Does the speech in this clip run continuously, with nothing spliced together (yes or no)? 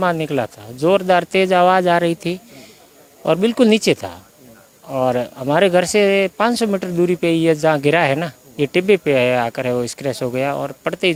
yes